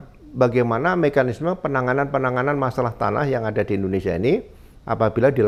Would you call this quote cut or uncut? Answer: uncut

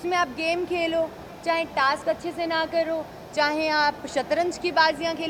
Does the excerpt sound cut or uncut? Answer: uncut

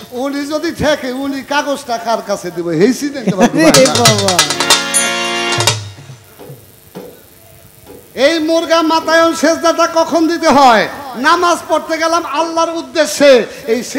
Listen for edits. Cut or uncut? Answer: uncut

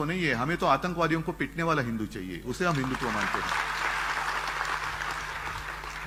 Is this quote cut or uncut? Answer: uncut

